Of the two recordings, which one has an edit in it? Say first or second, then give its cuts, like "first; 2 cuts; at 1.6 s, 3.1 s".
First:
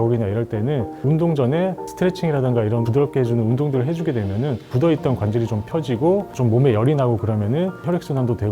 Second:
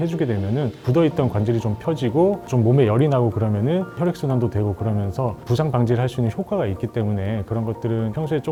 first; 1 cut; at 0.9 s